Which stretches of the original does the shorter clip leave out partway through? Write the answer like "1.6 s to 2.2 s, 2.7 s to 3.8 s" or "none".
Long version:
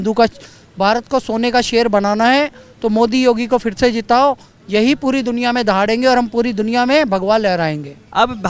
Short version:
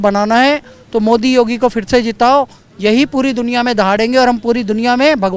none